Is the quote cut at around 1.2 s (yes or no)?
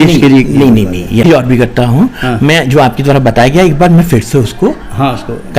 yes